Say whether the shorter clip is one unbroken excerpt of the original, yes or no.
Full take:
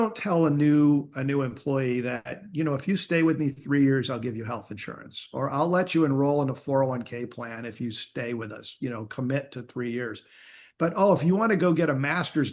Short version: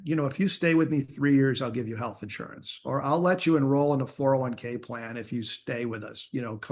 yes